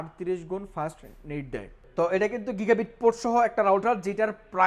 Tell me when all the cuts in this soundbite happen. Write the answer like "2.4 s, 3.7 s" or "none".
1.8 s